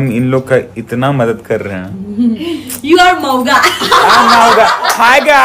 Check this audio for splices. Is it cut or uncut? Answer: uncut